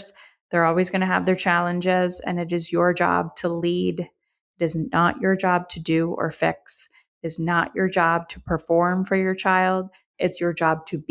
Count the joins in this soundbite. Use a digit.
1